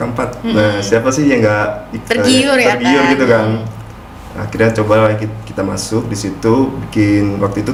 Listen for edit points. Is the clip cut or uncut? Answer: uncut